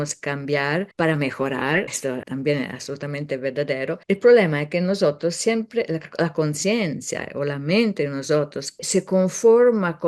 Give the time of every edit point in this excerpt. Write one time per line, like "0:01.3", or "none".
0:00.9
0:02.2
0:04.0
0:08.8